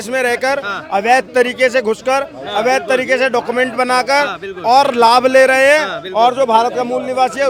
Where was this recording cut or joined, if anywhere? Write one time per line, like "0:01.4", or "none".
none